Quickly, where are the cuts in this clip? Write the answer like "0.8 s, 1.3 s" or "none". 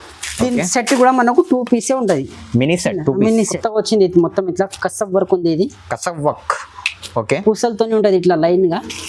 3.6 s